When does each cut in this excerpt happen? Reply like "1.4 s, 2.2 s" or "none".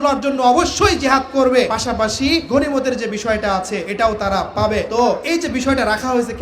2.2 s, 3.9 s, 5.1 s

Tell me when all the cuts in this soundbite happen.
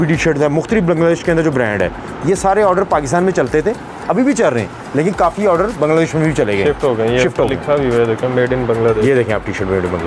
none

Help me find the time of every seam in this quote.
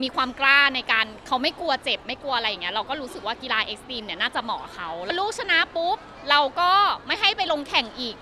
5.1 s

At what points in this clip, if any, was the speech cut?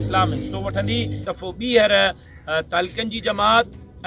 1.2 s

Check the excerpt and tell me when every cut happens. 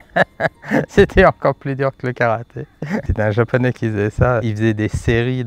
3.1 s, 4.5 s

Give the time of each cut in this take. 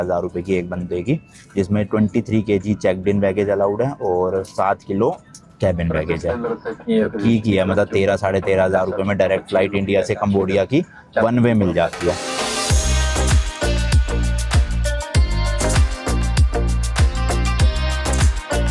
none

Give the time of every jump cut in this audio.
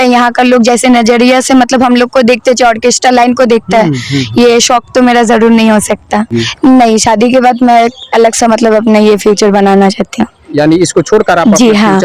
6.4 s

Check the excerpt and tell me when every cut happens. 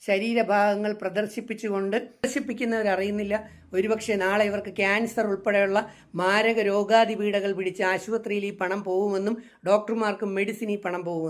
2.2 s

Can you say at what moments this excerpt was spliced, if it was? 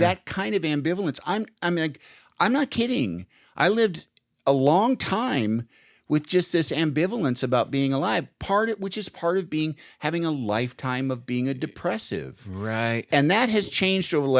none

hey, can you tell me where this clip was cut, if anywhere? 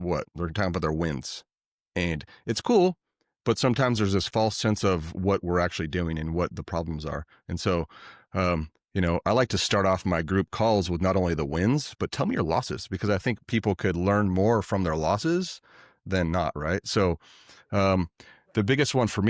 none

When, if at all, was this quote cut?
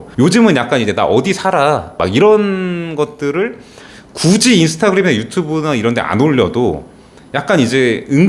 2.0 s

